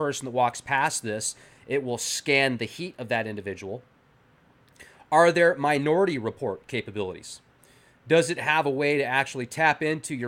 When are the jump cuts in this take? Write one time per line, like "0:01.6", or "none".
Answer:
0:05.8